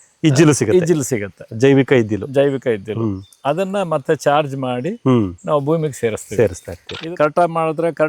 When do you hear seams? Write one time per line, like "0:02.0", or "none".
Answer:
0:06.9

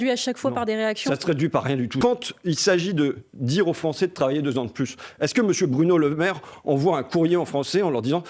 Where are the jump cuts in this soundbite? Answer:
0:01.9

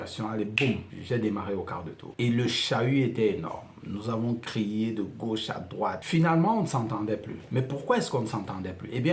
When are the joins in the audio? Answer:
0:00.9
0:02.0
0:06.0

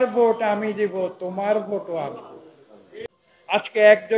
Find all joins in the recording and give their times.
0:03.1

